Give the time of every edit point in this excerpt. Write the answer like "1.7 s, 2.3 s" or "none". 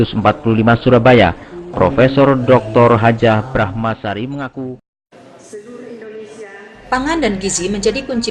5.1 s